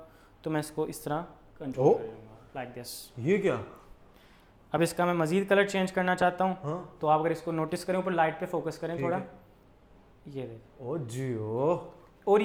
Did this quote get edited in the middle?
no; 0 cuts

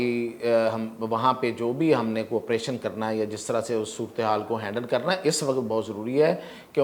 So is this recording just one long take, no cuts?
yes; 0 cuts

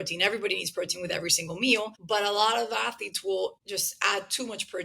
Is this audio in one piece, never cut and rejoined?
no; 2 cuts; at 2.0 s, 3.6 s

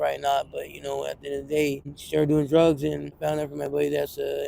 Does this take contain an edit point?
yes; 2 cuts; at 1.9 s, 3.2 s

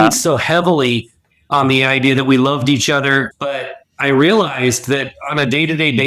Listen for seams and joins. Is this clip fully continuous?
no; 1 cut; at 3.3 s

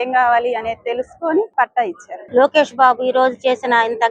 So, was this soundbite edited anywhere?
yes; 1 cut; at 1.9 s

